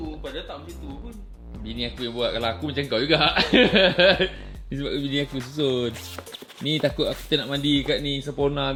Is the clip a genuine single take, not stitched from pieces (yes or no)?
yes